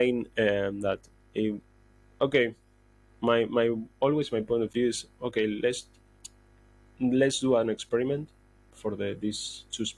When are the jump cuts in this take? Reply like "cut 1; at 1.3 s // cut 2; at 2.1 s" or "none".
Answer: none